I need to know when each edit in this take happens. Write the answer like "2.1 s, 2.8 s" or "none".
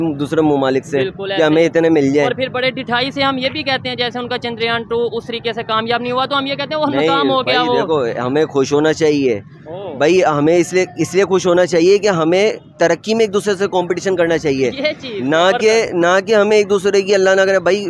none